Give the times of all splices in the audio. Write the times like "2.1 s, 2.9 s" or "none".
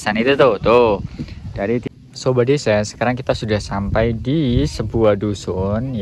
1.9 s